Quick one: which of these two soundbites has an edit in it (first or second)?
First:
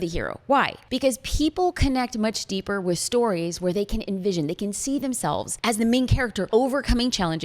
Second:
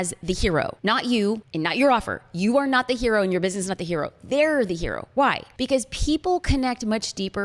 first